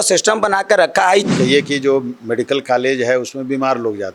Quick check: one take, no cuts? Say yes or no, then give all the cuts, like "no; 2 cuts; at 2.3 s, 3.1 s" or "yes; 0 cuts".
no; 1 cut; at 1.3 s